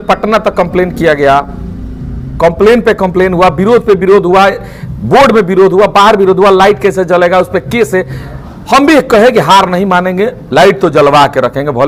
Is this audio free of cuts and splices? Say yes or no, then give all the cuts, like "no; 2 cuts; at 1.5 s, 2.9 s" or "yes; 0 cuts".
yes; 0 cuts